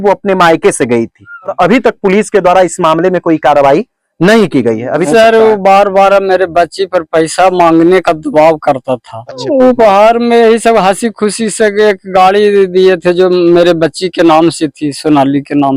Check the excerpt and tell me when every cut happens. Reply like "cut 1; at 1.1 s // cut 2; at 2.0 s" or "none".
cut 1; at 1.5 s // cut 2; at 5.1 s // cut 3; at 9.4 s